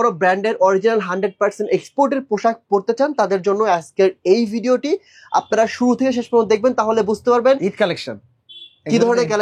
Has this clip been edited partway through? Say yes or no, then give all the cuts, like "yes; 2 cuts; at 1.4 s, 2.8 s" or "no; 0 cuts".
no; 0 cuts